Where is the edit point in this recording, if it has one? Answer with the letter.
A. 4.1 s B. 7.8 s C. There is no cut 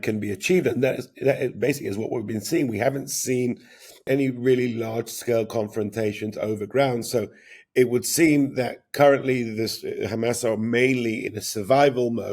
A